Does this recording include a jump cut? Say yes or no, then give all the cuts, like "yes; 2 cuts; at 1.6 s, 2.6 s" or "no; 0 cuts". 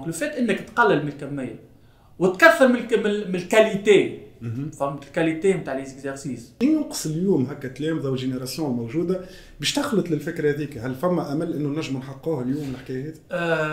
yes; 1 cut; at 6.5 s